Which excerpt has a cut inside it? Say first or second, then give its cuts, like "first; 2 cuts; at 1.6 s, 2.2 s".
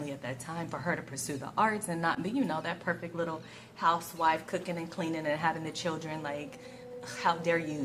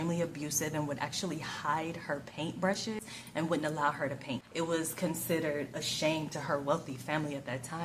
second; 2 cuts; at 3.0 s, 4.4 s